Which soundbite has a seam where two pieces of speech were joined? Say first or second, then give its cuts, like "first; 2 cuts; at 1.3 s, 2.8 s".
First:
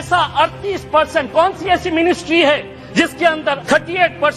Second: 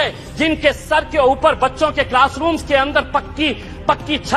first; 1 cut; at 3.2 s